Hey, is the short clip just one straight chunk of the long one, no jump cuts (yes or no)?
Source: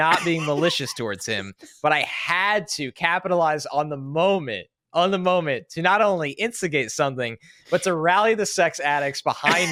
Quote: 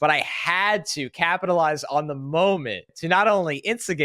no